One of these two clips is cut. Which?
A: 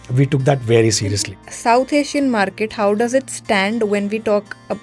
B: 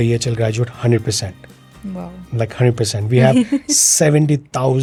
A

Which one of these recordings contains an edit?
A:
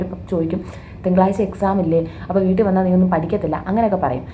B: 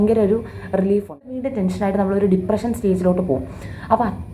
B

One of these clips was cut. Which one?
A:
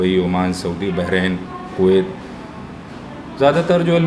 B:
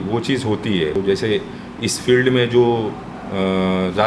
B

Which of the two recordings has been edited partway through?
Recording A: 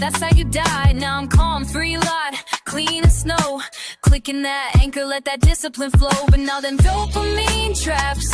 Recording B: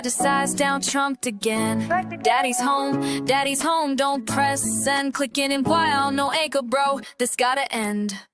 A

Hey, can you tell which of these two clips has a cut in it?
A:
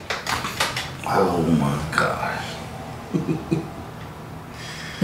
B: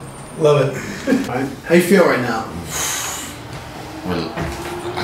B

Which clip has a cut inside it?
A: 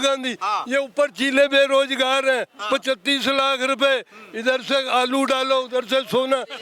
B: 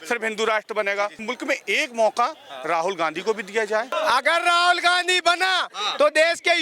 B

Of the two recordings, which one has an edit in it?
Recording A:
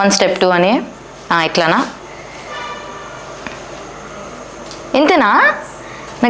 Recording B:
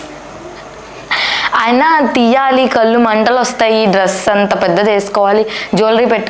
A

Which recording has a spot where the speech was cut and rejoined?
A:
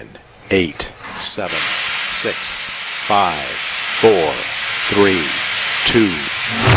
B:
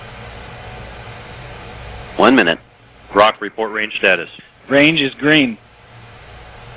A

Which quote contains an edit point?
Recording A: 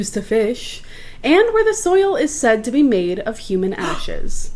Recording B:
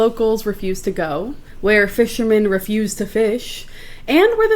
B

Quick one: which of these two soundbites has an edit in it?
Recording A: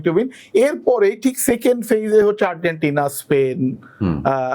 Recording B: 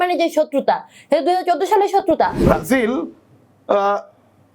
B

